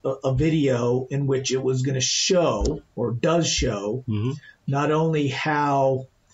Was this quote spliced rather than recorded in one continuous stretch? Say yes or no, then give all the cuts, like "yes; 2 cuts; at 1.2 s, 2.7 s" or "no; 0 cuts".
no; 0 cuts